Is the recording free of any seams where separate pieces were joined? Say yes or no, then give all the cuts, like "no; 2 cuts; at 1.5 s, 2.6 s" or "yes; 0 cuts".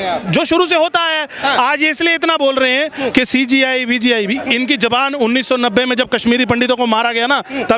yes; 0 cuts